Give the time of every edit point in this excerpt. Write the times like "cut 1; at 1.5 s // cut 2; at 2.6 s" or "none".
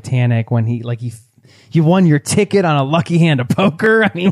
cut 1; at 1.6 s